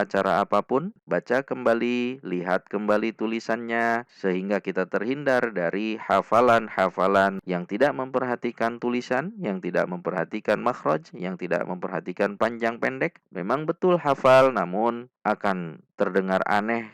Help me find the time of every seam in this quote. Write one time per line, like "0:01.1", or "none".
0:00.9
0:07.4
0:13.2